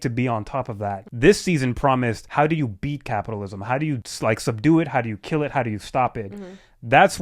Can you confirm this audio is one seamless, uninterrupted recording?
no; 3 cuts; at 1.1 s, 2.2 s, 4.1 s

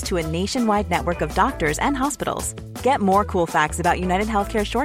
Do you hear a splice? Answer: no; 0 cuts

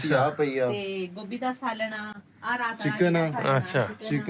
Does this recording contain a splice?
no; 0 cuts

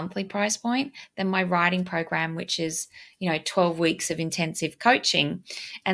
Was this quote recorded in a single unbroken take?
yes; 0 cuts

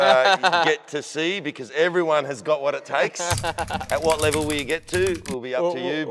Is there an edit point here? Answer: no; 0 cuts

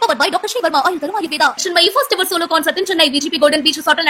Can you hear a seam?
no; 0 cuts

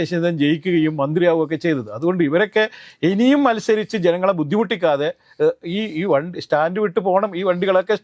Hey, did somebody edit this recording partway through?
no; 0 cuts

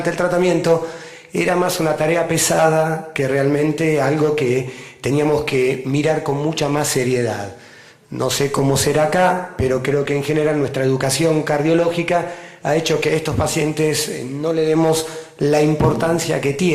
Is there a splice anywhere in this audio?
no; 0 cuts

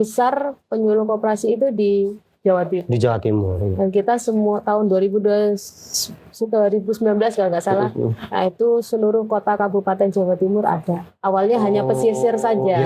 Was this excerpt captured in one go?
yes; 0 cuts

